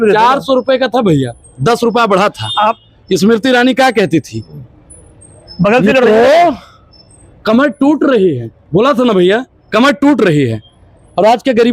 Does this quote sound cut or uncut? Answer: uncut